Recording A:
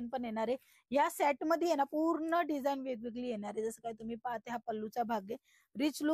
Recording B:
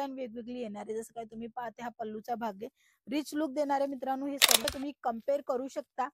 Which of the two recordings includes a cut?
B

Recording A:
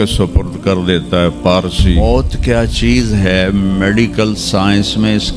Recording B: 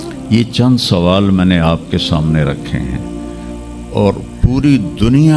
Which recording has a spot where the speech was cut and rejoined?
A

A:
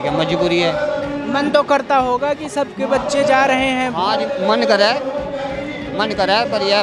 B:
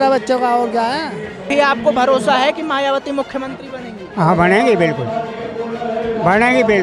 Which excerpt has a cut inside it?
B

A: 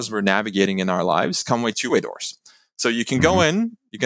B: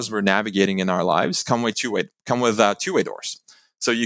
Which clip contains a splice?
A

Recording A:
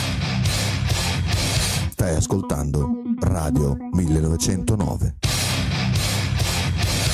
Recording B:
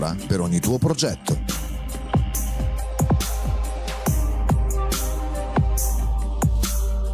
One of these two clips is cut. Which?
A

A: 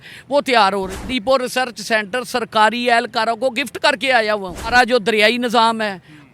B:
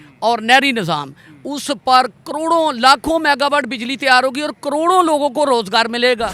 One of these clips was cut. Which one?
A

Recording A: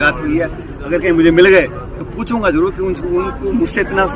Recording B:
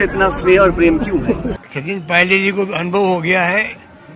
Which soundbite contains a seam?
B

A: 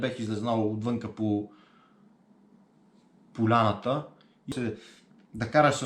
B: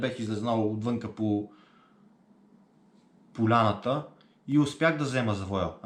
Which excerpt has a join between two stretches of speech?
A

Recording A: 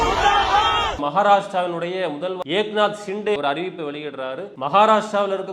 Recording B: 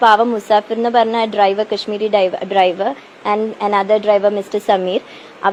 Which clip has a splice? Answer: A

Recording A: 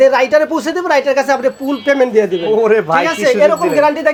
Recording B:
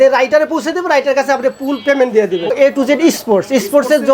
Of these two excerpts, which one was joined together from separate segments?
B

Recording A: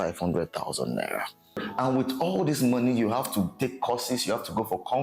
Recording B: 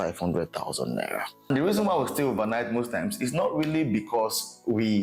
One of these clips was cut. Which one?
B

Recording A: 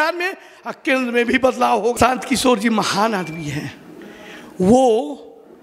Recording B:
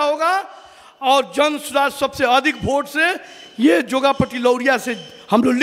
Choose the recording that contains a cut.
A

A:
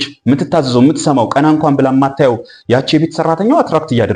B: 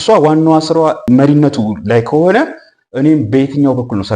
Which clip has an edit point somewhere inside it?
B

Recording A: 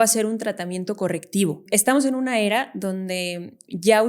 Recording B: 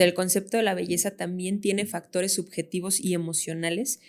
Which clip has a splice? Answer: A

